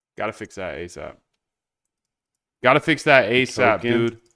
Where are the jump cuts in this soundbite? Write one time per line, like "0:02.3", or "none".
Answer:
0:00.9
0:03.0